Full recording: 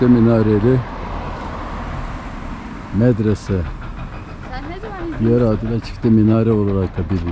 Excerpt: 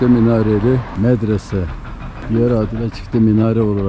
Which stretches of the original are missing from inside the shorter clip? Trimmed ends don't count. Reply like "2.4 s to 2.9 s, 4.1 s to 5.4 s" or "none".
0.9 s to 2.8 s, 4.2 s to 5.1 s